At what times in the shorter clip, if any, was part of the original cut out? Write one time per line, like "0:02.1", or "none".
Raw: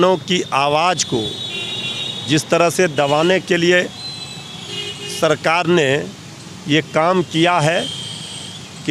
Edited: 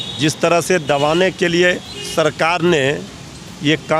0:01.9